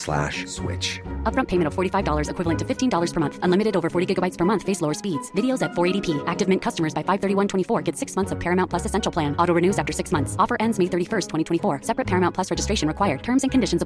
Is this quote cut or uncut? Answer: uncut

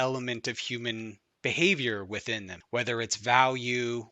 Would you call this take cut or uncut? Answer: cut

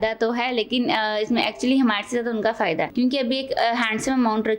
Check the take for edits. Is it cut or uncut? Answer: cut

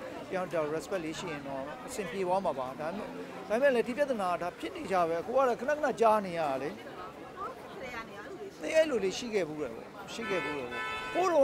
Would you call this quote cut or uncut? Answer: uncut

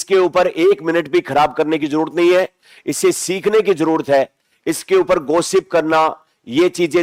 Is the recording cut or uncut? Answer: uncut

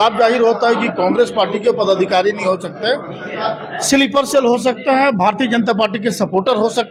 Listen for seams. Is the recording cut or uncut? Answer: uncut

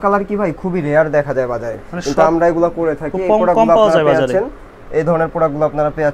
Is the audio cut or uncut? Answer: uncut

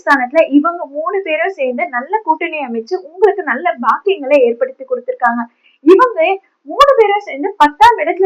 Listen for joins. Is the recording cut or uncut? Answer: uncut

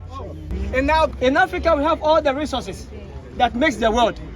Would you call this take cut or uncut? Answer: cut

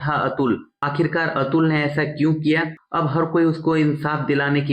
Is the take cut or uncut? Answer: cut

